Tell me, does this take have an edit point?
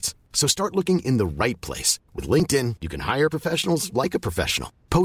no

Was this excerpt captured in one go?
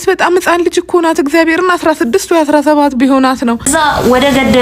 no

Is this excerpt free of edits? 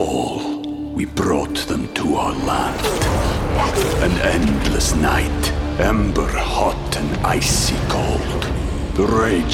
yes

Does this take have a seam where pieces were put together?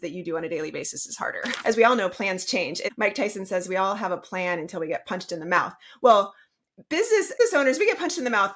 yes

